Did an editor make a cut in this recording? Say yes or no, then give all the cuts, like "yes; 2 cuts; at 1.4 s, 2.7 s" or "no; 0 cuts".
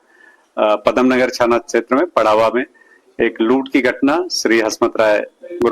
yes; 1 cut; at 3.9 s